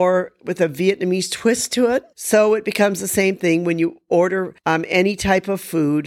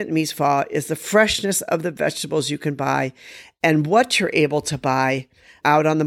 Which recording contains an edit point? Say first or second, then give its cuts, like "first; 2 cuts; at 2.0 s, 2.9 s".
first; 2 cuts; at 2.1 s, 4.1 s